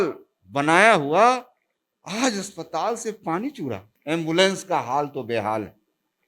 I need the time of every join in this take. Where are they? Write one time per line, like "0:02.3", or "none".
0:03.9